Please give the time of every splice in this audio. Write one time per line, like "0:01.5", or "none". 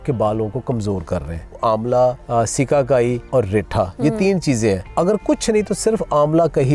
0:01.6
0:02.2
0:03.2
0:04.9